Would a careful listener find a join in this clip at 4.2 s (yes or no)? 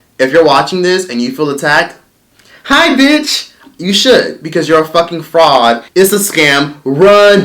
no